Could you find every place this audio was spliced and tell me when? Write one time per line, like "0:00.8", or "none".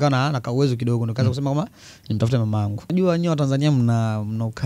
0:02.9

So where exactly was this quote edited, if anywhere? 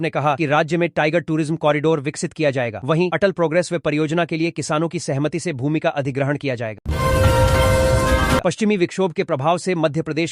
0:06.8
0:08.4

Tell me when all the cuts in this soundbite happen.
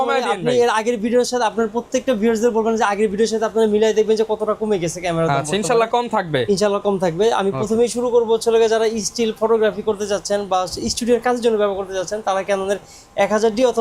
none

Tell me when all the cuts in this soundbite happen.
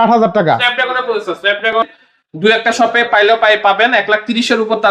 0:01.7

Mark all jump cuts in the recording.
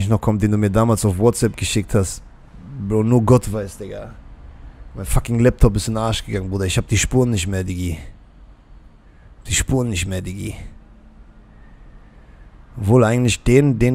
none

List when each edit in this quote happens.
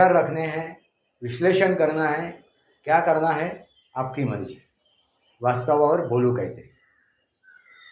none

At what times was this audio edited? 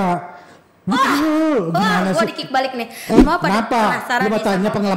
0:03.2

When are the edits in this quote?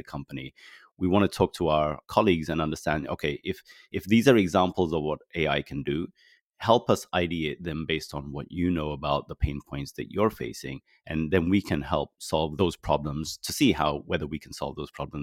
none

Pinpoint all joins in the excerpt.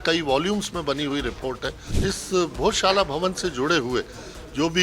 0:01.9

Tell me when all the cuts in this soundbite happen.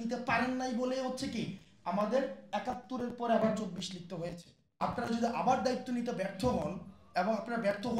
0:04.8

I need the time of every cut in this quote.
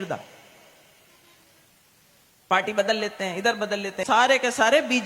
0:04.0

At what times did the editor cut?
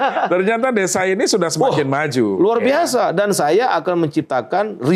none

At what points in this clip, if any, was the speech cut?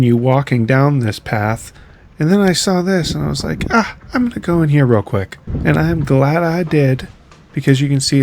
0:05.6

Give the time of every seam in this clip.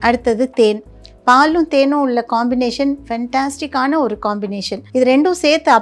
0:04.7

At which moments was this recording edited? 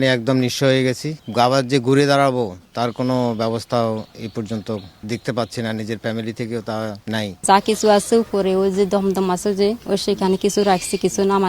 0:01.1
0:07.4

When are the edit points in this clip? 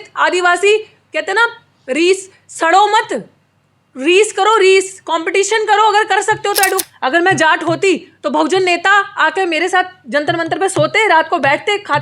0:06.9

